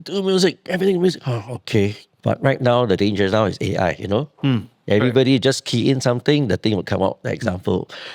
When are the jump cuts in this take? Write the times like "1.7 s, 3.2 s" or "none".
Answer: 2.1 s